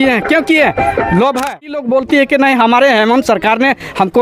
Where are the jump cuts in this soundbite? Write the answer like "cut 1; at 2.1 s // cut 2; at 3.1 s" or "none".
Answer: cut 1; at 1.8 s